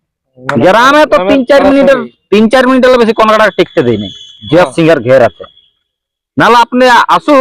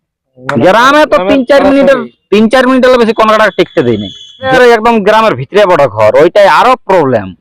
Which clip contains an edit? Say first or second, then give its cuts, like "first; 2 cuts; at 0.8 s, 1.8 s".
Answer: second; 1 cut; at 4.5 s